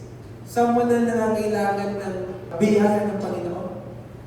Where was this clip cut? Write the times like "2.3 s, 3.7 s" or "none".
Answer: 2.5 s